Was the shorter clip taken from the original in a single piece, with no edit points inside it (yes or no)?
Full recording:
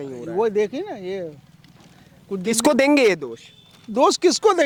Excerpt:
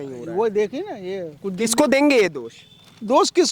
no